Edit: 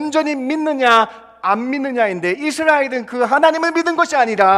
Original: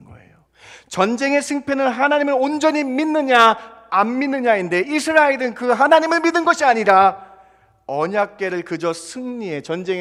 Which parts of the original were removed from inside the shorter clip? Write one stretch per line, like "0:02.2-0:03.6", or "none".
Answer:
none